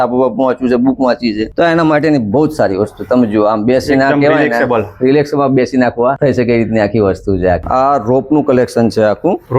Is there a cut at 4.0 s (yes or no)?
no